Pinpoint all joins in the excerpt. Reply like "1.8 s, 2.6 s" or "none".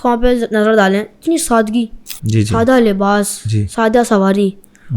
none